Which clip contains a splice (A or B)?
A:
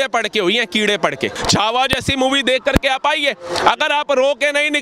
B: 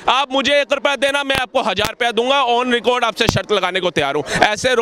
A